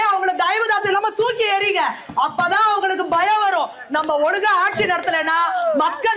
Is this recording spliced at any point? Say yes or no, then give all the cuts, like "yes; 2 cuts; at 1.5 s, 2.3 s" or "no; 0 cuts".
no; 0 cuts